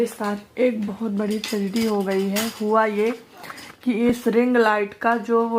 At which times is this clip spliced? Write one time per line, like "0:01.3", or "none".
none